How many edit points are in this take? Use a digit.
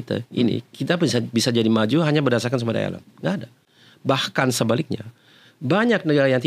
0